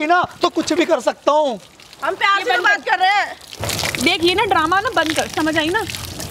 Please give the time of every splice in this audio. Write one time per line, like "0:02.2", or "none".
none